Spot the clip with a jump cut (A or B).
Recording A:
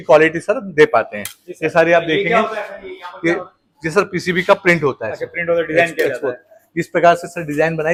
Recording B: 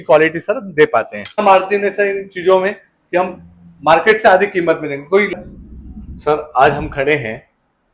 B